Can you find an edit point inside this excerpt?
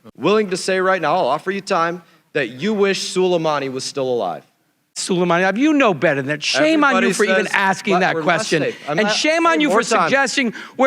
yes; 1 cut; at 5.0 s

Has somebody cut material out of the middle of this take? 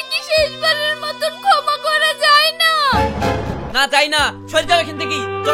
no; 0 cuts

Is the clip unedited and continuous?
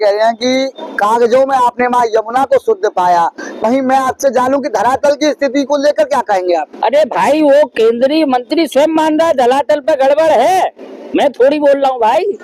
yes; 0 cuts

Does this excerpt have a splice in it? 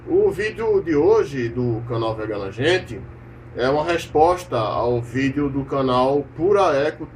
no; 0 cuts

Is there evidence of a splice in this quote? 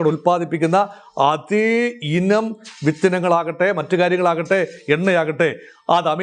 no; 0 cuts

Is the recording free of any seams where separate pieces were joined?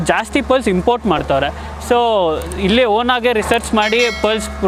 yes; 0 cuts

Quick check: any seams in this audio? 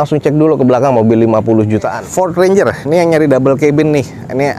yes; 1 cut; at 2.0 s

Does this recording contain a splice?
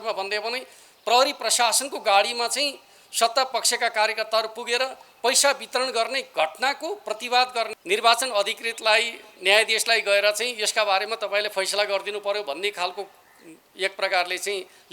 yes; 1 cut; at 7.7 s

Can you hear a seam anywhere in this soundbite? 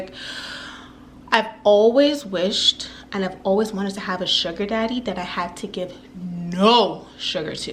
no; 0 cuts

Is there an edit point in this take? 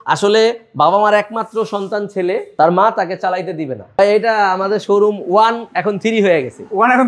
yes; 2 cuts; at 2.5 s, 4.0 s

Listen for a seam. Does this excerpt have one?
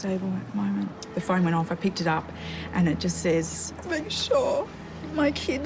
yes; 1 cut; at 1.0 s

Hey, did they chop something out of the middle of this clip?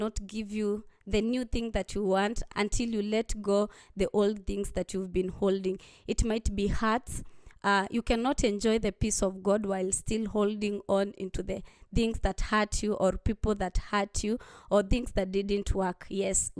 yes; 1 cut; at 2.5 s

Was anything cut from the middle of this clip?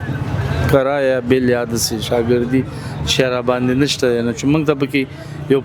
no; 0 cuts

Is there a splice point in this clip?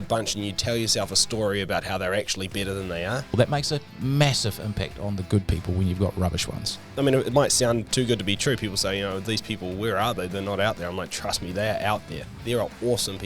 yes; 2 cuts; at 3.4 s, 6.9 s

